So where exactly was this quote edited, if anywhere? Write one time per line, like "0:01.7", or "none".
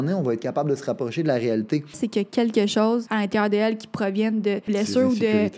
0:02.0
0:03.1
0:04.7